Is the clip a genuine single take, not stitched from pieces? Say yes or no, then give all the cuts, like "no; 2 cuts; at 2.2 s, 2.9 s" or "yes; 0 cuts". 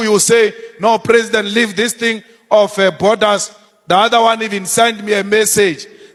yes; 0 cuts